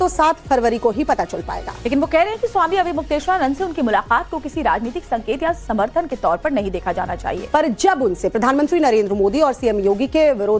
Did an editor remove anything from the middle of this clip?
no; 0 cuts

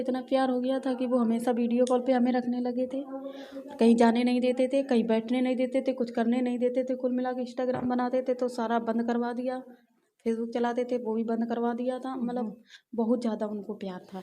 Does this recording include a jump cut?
no; 0 cuts

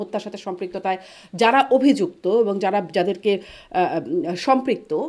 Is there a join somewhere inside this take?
no; 0 cuts

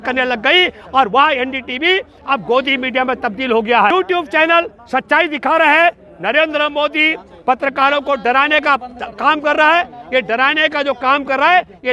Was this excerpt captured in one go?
no; 1 cut; at 3.9 s

